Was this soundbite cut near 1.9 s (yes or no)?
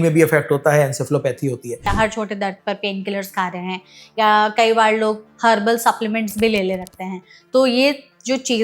yes